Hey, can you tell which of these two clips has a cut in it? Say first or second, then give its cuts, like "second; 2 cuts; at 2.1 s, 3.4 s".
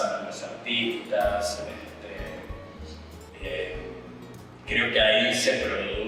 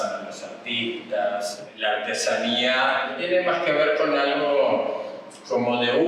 second; 2 cuts; at 1.7 s, 3.2 s